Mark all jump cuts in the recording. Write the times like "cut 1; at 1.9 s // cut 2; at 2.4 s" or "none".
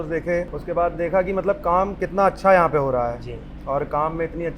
none